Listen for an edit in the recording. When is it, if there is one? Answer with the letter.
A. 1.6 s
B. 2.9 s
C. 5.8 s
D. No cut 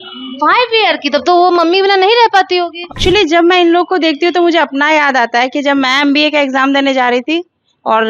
B